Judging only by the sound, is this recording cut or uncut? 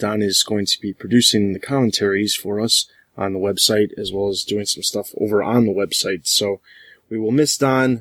uncut